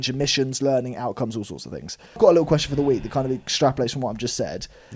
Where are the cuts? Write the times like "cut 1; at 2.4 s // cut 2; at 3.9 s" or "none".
cut 1; at 2.2 s